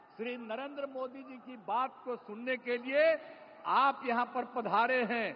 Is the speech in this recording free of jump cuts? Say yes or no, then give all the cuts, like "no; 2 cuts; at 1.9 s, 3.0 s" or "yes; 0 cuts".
yes; 0 cuts